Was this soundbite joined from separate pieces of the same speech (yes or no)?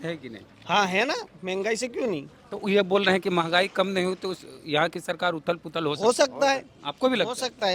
no